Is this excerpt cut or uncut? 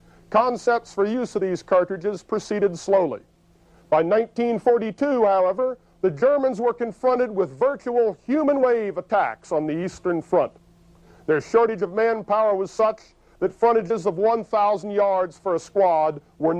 uncut